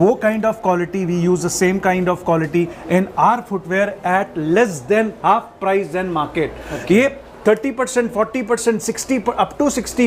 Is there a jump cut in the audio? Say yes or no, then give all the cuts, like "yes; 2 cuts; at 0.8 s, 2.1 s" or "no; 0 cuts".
no; 0 cuts